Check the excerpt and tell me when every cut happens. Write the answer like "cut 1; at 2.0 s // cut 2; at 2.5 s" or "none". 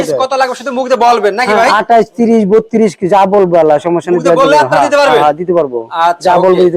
none